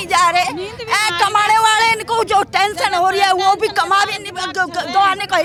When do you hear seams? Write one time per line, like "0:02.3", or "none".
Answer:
none

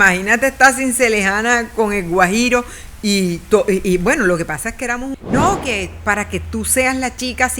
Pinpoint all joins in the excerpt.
0:05.0

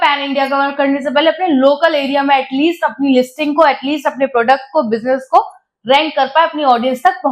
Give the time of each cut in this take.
none

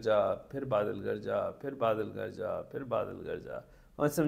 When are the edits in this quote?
none

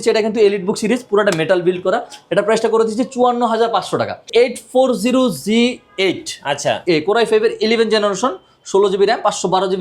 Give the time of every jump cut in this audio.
0:04.3

